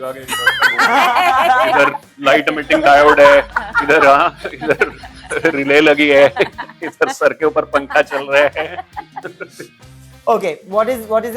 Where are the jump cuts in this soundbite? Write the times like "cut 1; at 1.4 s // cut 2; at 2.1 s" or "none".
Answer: none